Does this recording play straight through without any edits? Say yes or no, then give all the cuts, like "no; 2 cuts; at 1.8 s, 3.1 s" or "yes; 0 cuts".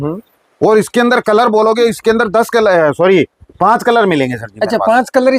yes; 0 cuts